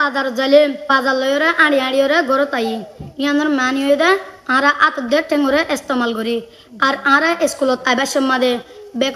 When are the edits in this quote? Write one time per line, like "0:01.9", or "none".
0:00.8
0:02.1